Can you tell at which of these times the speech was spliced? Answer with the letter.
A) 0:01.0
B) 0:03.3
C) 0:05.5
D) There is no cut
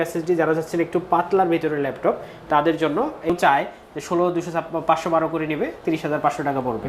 B